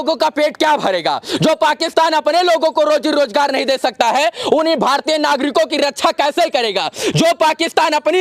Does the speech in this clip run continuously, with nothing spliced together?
yes; 0 cuts

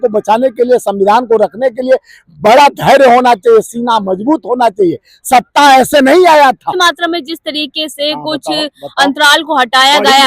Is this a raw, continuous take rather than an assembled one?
no; 1 cut; at 6.8 s

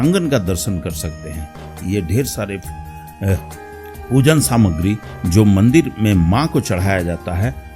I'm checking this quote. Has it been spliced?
no; 0 cuts

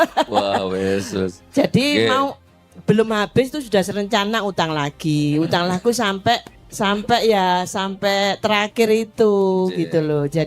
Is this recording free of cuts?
no; 1 cut; at 6.6 s

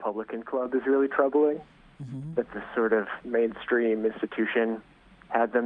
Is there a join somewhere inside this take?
yes; 1 cut; at 3.2 s

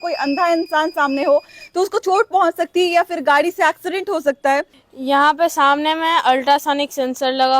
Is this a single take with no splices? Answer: no; 1 cut; at 4.8 s

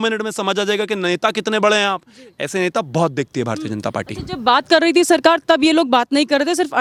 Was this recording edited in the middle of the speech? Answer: no; 0 cuts

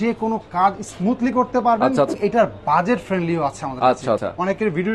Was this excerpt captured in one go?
no; 2 cuts; at 2.1 s, 4.2 s

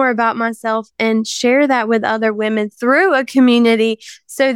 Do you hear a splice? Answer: no; 0 cuts

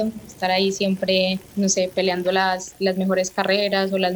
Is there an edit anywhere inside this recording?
yes; 1 cut; at 1.4 s

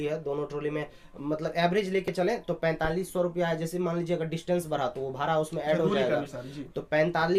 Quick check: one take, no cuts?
yes; 0 cuts

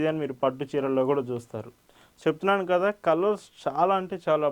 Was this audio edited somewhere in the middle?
yes; 1 cut; at 2.1 s

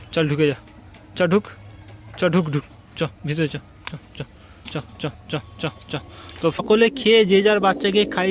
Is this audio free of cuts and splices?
no; 1 cut; at 6.6 s

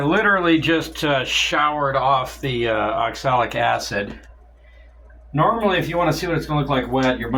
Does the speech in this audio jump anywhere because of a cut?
no; 0 cuts

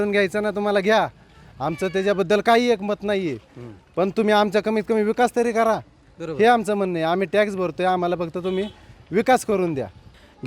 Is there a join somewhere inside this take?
no; 0 cuts

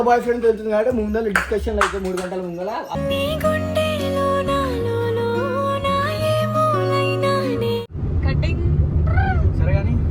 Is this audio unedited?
no; 1 cut; at 7.8 s

